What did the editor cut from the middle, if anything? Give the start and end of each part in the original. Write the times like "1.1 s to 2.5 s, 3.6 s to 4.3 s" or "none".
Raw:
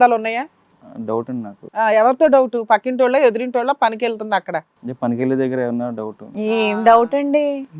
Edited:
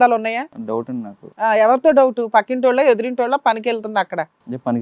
1.0 s to 1.3 s